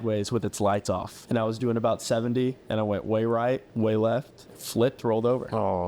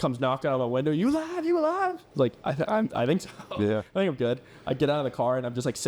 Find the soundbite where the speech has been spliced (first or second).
first